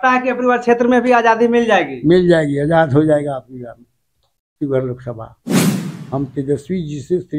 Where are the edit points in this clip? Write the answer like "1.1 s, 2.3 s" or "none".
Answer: 5.7 s